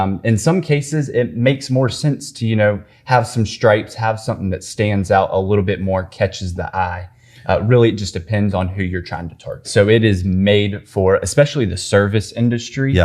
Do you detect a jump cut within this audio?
yes; 1 cut; at 9.7 s

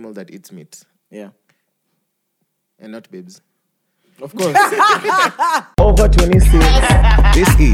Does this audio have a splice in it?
yes; 1 cut; at 5.7 s

